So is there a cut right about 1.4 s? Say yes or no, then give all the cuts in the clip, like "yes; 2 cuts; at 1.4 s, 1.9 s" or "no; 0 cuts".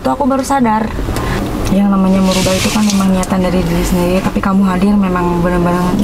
yes; 1 cut; at 1.4 s